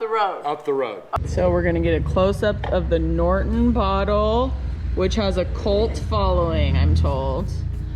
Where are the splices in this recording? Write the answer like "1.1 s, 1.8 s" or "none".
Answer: 1.0 s